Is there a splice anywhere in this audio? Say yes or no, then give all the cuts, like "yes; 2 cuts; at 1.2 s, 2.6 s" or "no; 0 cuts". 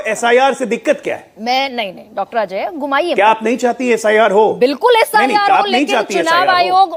no; 0 cuts